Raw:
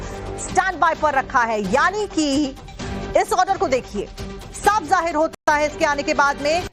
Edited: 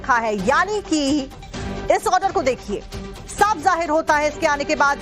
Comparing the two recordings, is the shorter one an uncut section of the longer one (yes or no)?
no